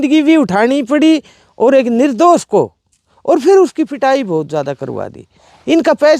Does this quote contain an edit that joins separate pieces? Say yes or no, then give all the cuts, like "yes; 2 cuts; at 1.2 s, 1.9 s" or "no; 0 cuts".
no; 0 cuts